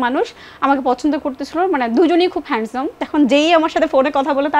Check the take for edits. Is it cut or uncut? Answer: cut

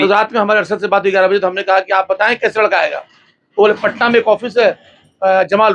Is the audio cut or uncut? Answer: uncut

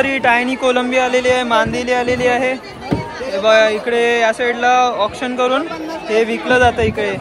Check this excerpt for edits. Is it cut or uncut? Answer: uncut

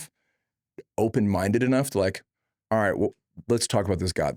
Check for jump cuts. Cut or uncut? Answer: uncut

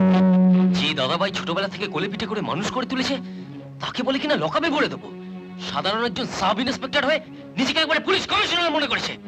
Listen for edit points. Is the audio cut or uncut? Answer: uncut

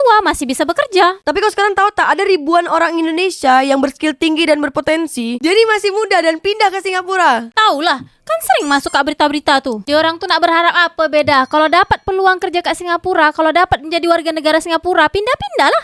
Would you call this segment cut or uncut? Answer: uncut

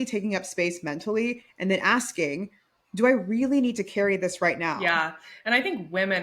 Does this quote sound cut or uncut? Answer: uncut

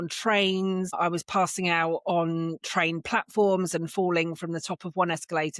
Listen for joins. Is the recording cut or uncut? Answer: cut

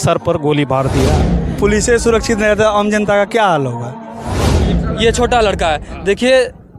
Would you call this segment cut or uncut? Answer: cut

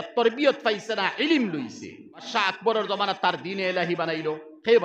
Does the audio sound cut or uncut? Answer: cut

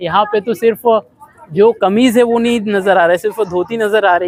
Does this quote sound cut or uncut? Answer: uncut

